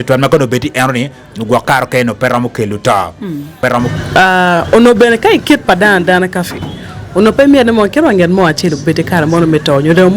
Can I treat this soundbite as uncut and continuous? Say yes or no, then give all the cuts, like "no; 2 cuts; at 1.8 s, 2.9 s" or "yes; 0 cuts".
no; 1 cut; at 3.7 s